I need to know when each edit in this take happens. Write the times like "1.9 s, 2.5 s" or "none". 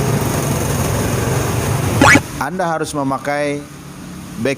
2.2 s